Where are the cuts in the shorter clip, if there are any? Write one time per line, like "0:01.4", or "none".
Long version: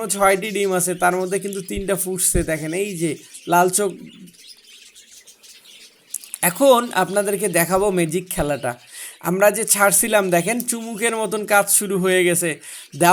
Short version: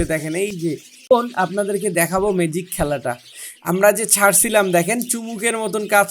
0:01.1